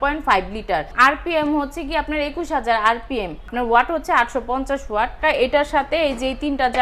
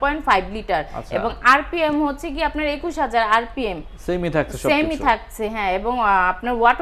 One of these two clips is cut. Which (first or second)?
first